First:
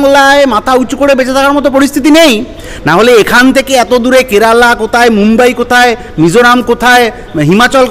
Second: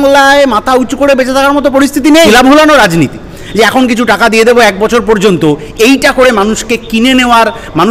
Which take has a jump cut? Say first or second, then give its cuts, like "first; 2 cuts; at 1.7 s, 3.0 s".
second; 1 cut; at 2.3 s